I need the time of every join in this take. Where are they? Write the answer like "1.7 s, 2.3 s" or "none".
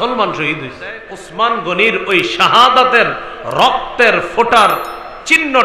1.2 s